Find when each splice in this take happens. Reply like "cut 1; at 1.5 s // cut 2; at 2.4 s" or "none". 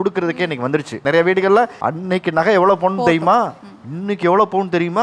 cut 1; at 0.9 s // cut 2; at 1.8 s